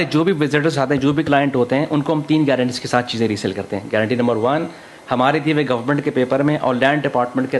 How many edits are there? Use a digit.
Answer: 0